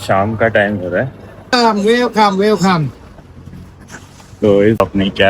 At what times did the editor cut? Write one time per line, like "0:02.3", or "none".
0:01.5